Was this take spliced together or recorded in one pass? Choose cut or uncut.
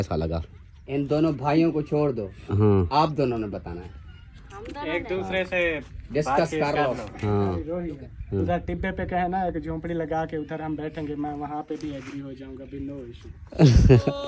cut